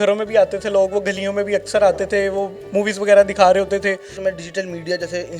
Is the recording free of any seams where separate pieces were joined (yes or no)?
no